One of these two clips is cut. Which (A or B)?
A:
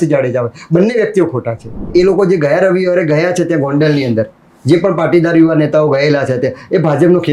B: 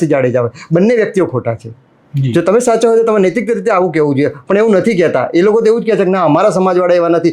A